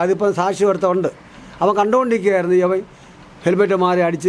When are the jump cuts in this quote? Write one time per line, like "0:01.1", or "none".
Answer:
none